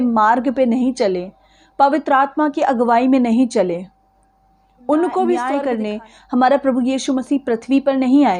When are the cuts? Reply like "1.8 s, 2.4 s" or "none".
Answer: 5.6 s